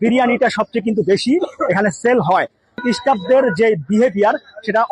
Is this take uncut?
no; 1 cut; at 2.8 s

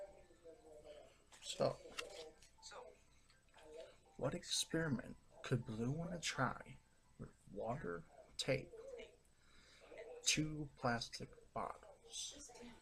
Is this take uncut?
yes; 0 cuts

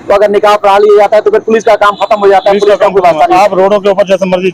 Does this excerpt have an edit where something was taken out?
no; 0 cuts

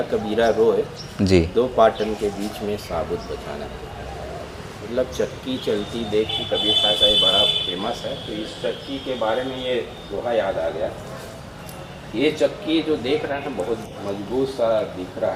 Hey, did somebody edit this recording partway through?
no; 0 cuts

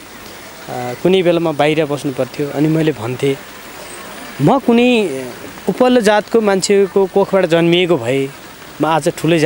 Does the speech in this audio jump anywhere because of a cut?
no; 0 cuts

